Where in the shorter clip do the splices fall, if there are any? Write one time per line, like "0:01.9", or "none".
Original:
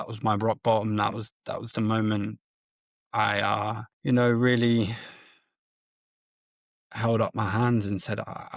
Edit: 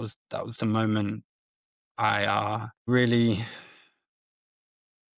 0:02.9